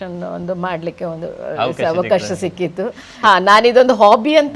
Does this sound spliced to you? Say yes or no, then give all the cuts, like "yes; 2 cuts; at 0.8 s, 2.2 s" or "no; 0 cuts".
yes; 1 cut; at 3.1 s